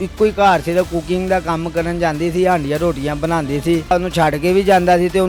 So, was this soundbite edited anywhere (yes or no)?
no